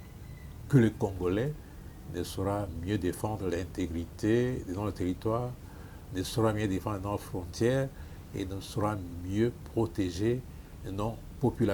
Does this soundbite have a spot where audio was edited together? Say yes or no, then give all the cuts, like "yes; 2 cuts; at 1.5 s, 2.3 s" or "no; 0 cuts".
no; 0 cuts